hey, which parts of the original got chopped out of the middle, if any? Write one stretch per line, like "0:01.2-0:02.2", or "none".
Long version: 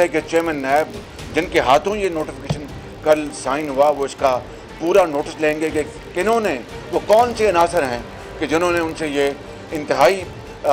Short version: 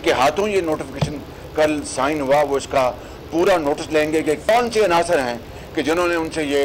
0:06.0-0:07.1